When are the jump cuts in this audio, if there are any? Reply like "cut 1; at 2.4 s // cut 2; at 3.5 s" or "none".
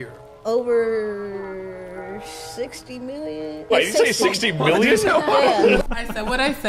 cut 1; at 5.8 s